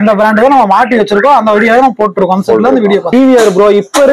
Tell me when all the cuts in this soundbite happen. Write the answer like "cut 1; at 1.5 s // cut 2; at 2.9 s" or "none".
cut 1; at 3.1 s